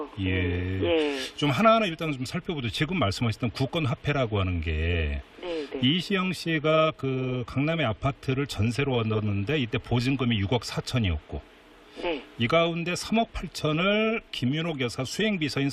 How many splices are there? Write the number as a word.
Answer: one